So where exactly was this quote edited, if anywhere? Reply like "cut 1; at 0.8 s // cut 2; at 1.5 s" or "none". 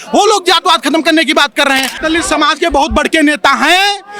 cut 1; at 2.0 s